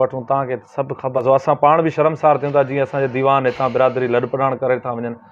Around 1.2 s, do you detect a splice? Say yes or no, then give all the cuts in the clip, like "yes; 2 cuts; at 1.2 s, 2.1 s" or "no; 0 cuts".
yes; 1 cut; at 1.2 s